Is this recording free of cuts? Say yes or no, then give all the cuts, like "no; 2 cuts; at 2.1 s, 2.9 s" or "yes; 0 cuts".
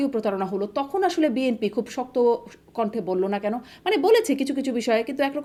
yes; 0 cuts